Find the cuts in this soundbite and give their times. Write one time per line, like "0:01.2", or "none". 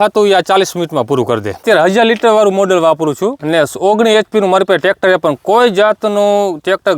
0:01.6
0:03.4